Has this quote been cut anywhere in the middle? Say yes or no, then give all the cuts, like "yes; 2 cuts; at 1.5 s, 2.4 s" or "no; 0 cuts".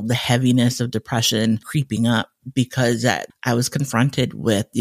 yes; 2 cuts; at 1.7 s, 3.3 s